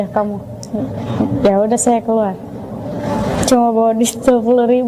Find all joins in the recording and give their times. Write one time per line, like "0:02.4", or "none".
none

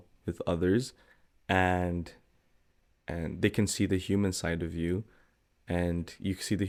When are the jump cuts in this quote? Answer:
none

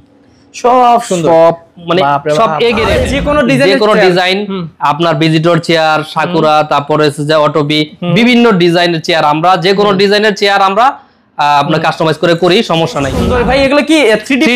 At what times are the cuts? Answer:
0:03.1
0:13.2

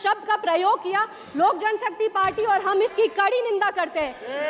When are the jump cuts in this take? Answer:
none

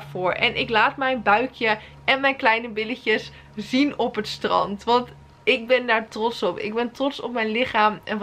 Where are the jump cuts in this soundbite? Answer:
none

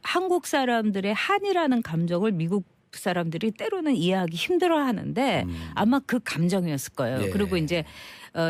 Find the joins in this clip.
0:04.4

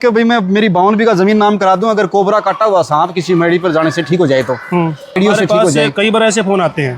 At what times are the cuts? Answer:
0:05.1

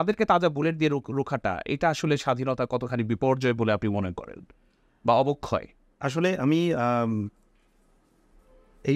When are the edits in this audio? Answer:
none

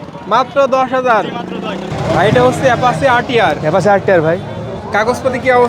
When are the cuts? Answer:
0:01.9

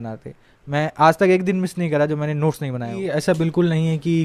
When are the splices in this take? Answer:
0:03.1

